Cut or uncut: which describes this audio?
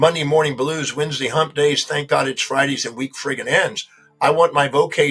uncut